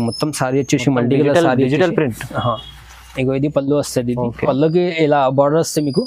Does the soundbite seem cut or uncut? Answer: cut